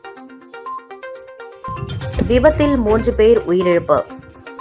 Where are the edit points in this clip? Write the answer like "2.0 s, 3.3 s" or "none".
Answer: 1.8 s